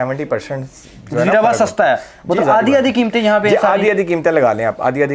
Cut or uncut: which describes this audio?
uncut